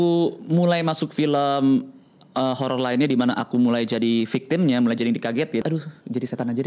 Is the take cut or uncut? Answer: cut